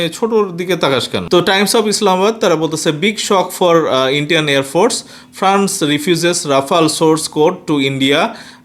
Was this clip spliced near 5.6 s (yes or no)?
no